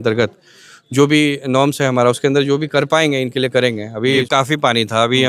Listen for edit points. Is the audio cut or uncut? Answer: cut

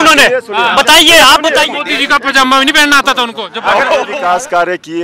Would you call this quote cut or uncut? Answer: cut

